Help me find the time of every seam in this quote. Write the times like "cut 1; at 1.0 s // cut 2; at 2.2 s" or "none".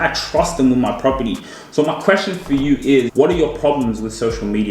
cut 1; at 3.1 s